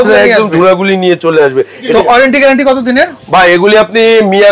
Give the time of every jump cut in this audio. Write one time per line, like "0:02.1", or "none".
0:01.9